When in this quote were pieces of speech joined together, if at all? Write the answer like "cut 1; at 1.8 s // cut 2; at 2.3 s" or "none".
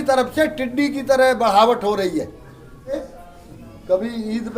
cut 1; at 2.9 s